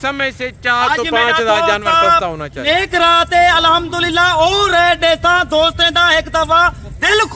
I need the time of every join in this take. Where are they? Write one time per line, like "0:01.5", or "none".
0:02.6